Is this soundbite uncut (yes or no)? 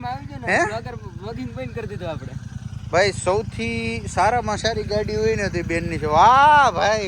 yes